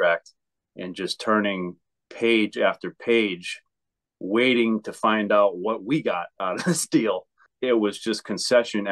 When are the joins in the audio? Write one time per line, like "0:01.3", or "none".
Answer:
0:07.4